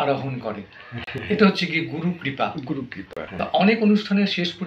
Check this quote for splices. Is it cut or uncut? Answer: uncut